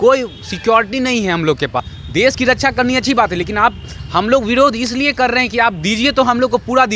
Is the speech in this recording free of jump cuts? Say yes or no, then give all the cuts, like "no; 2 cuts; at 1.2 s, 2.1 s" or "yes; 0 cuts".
no; 1 cut; at 1.9 s